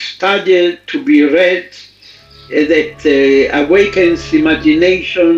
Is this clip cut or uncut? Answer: uncut